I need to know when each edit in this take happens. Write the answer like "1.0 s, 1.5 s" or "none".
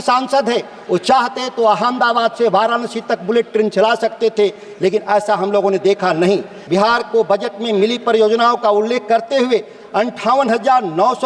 6.5 s